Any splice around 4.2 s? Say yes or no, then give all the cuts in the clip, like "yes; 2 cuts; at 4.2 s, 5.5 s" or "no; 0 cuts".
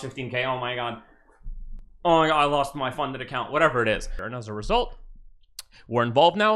yes; 1 cut; at 4.2 s